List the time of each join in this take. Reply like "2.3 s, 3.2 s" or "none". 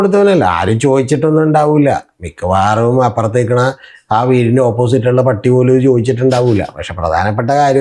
none

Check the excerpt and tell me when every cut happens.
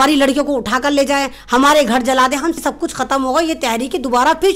2.6 s

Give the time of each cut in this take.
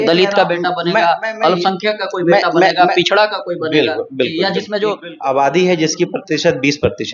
5.1 s

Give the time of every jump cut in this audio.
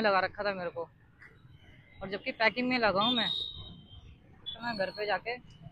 4.5 s

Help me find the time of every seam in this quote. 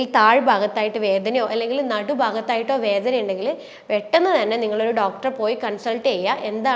none

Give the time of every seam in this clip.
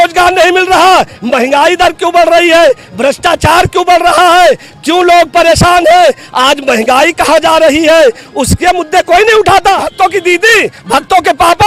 9.9 s

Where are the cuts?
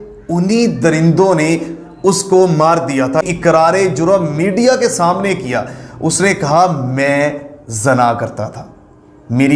3.3 s

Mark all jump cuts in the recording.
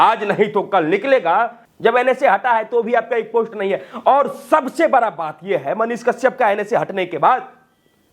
1.6 s

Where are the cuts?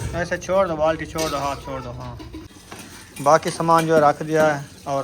2.5 s

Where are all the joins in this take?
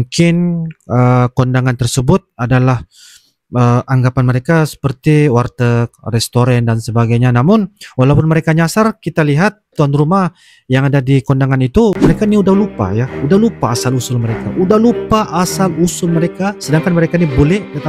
12.0 s

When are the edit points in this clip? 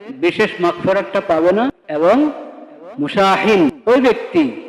1.8 s, 3.8 s

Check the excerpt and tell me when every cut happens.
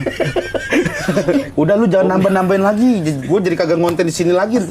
1.5 s

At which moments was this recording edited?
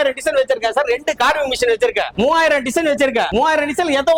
2.1 s, 3.3 s

